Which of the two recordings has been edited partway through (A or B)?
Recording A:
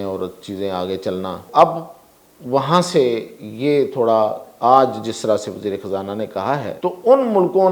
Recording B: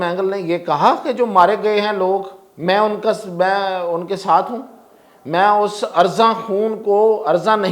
A